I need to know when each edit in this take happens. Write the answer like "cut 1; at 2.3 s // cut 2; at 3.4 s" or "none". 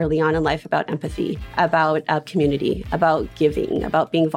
cut 1; at 1.4 s

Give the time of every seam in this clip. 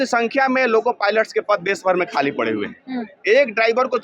none

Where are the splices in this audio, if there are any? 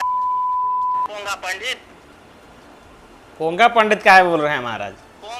cut 1; at 1.0 s

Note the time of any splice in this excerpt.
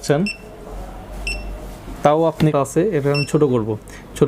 cut 1; at 2.3 s

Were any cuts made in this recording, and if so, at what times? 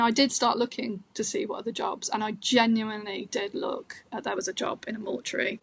none

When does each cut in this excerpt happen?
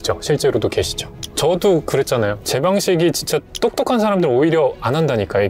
cut 1; at 2.4 s

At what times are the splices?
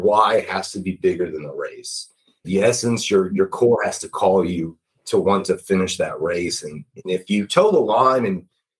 cut 1; at 2.4 s

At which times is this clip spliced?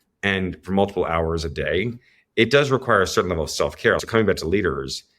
cut 1; at 4.0 s

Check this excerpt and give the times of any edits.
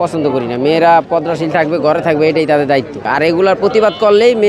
cut 1; at 3.1 s

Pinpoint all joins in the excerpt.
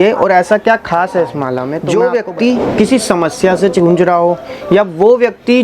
cut 1; at 1.8 s

